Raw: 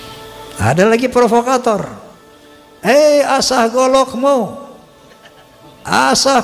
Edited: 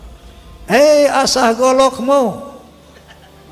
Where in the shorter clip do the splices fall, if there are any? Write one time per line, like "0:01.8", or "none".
none